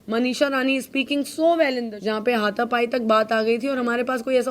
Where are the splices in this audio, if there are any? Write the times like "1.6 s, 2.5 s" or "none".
1.9 s

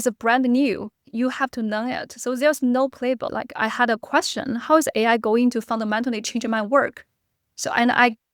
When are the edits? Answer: 1.0 s, 3.3 s

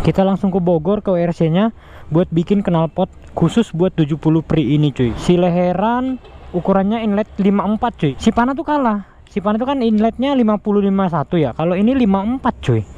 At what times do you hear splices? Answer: 5.1 s, 8.1 s

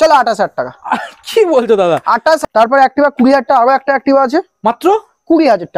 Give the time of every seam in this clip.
2.4 s

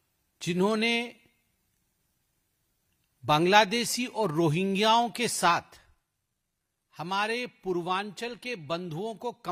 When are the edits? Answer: none

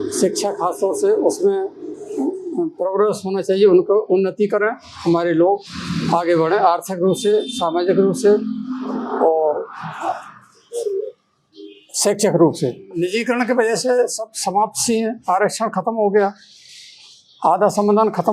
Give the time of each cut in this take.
12.8 s

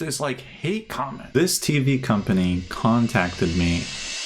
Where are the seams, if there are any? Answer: 1.2 s

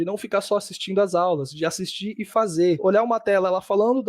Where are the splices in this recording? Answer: 2.8 s

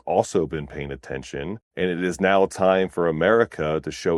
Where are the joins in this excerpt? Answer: 1.6 s

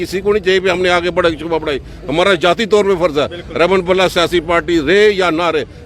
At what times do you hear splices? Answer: none

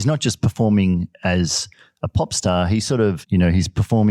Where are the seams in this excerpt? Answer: 3.2 s

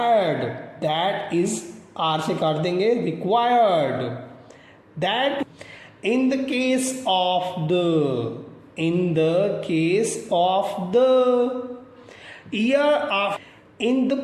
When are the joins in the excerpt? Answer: 5.4 s, 13.4 s

